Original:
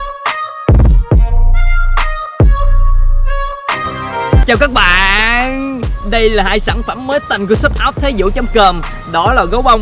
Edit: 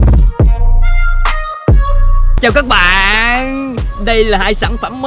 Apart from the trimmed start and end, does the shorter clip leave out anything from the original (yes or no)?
yes